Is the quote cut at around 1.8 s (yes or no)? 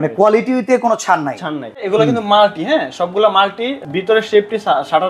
yes